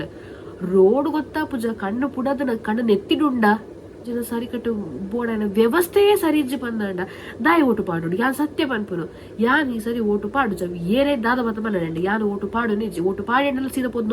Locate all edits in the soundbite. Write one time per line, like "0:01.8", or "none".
0:04.1